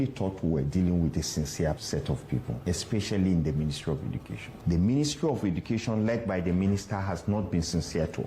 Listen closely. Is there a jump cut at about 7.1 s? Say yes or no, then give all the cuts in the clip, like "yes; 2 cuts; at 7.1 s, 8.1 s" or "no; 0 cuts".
no; 2 cuts; at 2.2 s, 4.5 s